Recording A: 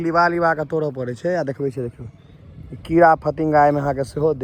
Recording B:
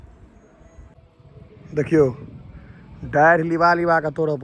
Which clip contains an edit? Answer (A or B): B